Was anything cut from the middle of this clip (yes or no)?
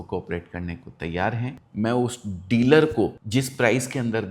yes